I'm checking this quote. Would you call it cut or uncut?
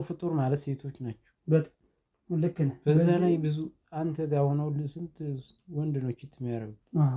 uncut